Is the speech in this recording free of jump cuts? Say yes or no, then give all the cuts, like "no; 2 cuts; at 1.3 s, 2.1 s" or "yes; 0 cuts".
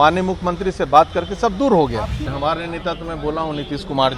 no; 1 cut; at 2.3 s